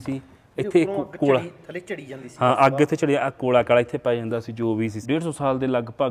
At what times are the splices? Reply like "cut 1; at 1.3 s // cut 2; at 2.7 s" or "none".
cut 1; at 5.0 s